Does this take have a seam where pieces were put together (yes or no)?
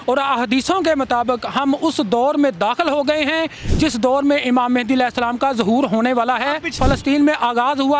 yes